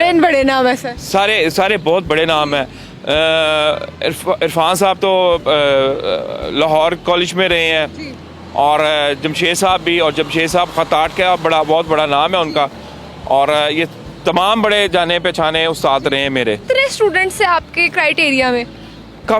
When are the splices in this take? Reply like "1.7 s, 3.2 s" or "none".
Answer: none

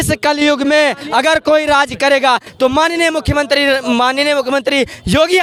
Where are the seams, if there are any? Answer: none

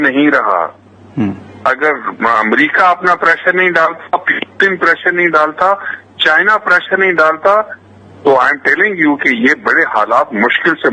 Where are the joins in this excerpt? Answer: none

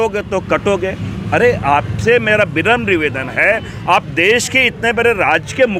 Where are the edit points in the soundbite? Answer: none

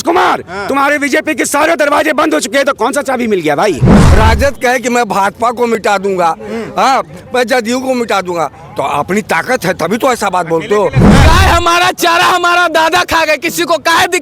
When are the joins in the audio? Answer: 3.9 s, 11.0 s

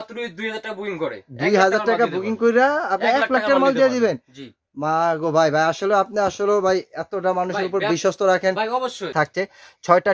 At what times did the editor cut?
9.1 s

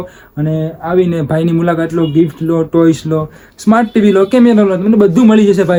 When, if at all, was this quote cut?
none

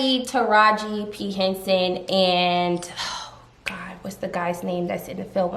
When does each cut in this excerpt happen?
none

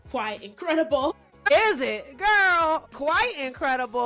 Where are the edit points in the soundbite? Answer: 1.1 s, 2.9 s

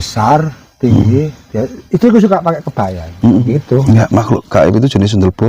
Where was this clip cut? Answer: 3.5 s

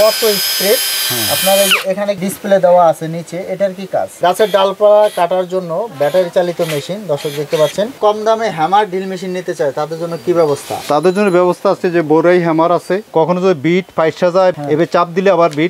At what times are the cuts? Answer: 4.1 s, 8.0 s, 13.0 s

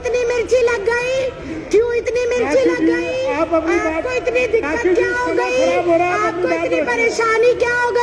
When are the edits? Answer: none

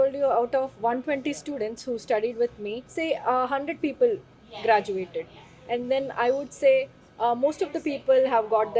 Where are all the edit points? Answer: 2.8 s

